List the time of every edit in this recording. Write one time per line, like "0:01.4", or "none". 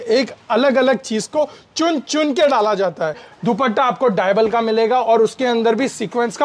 0:03.3